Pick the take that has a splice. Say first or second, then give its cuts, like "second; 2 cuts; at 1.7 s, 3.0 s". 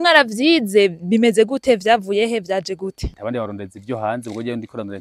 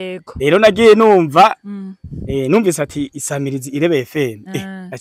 first; 1 cut; at 3.1 s